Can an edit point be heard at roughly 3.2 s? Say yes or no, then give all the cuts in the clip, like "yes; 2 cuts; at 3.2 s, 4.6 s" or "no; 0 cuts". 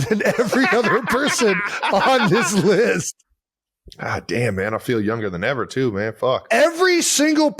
no; 0 cuts